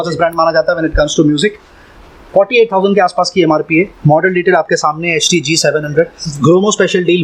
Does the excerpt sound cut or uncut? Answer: uncut